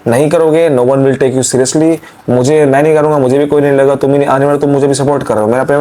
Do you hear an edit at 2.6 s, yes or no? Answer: no